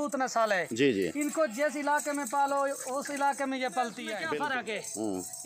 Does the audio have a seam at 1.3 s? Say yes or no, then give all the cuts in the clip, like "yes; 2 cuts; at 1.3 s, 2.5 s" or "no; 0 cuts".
no; 1 cut; at 4.1 s